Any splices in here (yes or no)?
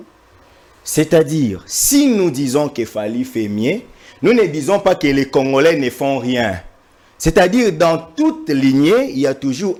no